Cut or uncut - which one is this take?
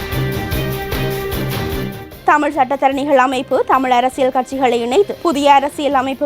cut